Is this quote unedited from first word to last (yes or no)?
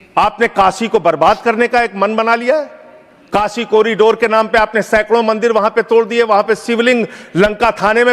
yes